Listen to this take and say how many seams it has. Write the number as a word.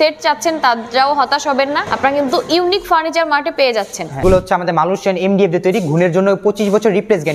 two